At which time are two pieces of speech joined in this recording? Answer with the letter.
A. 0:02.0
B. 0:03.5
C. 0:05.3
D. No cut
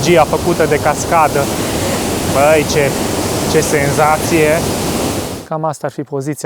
C